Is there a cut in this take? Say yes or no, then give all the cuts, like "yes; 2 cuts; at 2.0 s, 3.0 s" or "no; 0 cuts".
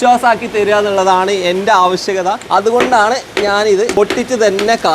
yes; 2 cuts; at 2.4 s, 3.9 s